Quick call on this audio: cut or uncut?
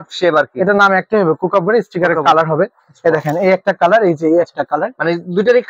uncut